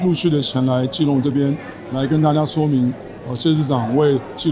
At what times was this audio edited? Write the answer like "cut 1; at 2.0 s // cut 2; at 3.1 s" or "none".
none